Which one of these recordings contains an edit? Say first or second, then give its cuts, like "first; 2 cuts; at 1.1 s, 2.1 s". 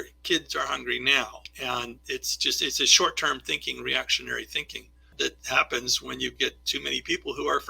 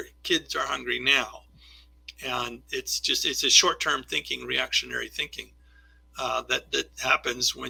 first; 2 cuts; at 1.4 s, 5.1 s